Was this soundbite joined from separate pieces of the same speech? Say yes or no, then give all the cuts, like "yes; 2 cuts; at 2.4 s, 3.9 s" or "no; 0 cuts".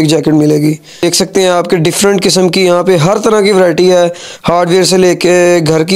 yes; 1 cut; at 1.0 s